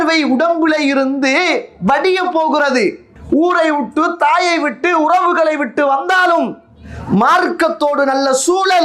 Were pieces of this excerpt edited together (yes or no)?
yes